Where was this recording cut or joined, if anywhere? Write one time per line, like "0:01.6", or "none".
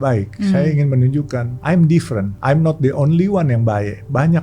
0:01.5
0:02.3